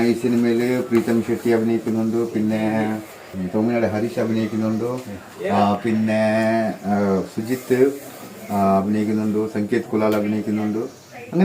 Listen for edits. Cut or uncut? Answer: cut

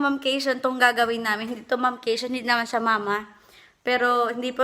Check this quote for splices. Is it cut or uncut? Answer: uncut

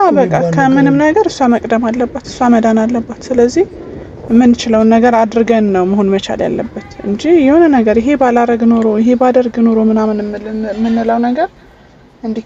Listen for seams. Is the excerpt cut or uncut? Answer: uncut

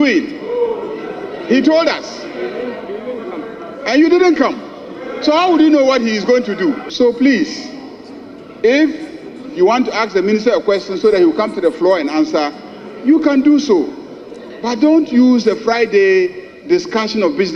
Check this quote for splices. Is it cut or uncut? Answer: cut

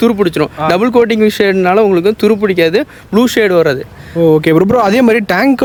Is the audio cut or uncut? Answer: uncut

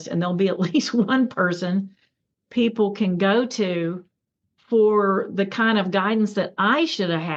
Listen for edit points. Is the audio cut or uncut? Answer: uncut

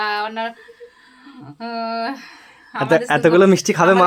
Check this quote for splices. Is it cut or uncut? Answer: uncut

